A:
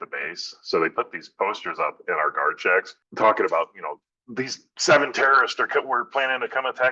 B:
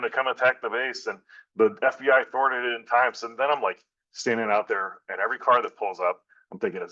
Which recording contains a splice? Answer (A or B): A